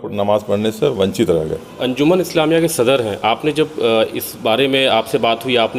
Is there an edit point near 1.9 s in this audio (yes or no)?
yes